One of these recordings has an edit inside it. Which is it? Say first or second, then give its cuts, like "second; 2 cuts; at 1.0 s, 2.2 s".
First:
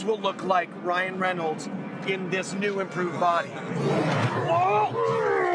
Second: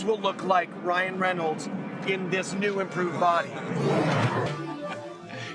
second; 1 cut; at 4.5 s